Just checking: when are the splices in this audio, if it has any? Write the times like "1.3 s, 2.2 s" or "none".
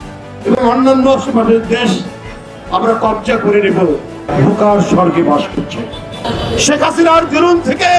4.3 s, 6.2 s

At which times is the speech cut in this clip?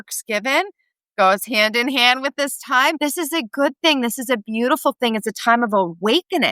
3.0 s

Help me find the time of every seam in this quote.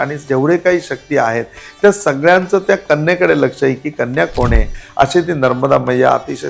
4.7 s

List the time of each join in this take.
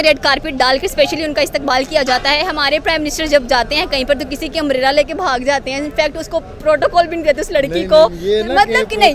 none

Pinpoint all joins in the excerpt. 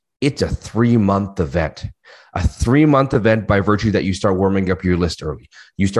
none

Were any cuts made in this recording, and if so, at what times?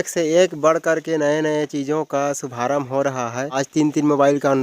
3.6 s

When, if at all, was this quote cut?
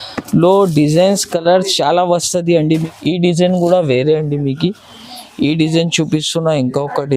2.9 s

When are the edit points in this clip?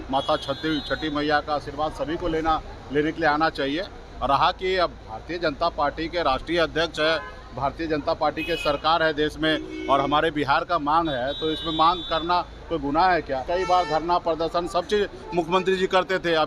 13.4 s

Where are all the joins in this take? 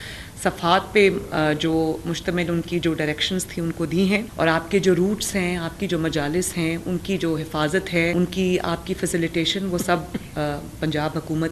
4.3 s, 8.1 s

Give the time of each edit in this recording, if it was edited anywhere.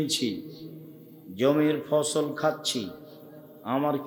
none

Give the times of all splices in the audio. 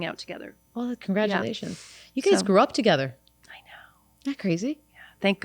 none

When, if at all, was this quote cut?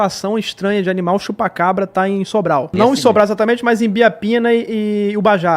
2.7 s

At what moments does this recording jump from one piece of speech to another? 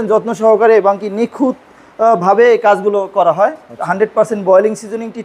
none

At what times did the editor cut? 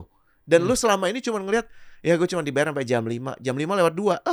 none

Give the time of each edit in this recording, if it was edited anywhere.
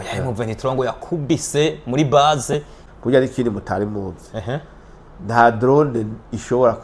2.8 s

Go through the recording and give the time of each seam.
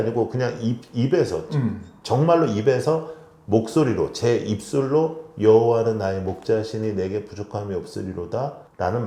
none

